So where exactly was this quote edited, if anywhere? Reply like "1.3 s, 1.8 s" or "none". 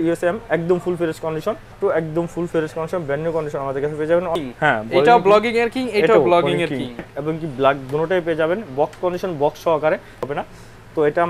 1.8 s, 4.4 s, 7.0 s, 10.2 s